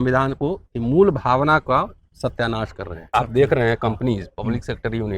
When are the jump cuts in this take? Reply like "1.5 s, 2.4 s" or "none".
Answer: 2.9 s